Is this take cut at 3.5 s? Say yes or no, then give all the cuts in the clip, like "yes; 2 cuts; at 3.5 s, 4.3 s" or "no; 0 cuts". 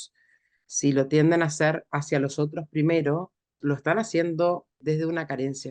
yes; 2 cuts; at 3.5 s, 4.8 s